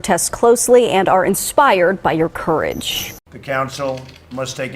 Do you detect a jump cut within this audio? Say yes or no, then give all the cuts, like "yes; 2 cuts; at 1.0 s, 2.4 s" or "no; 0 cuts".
yes; 1 cut; at 3.1 s